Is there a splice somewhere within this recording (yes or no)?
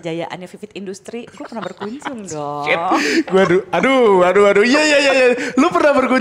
no